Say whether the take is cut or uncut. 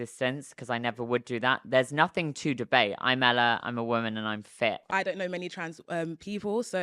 cut